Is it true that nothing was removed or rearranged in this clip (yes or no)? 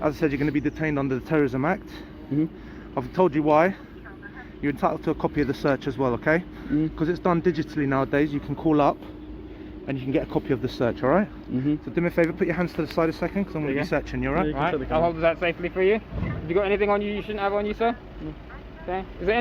no